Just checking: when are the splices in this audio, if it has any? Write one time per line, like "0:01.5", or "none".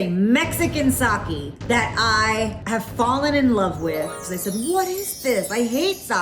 0:01.6
0:02.6
0:04.3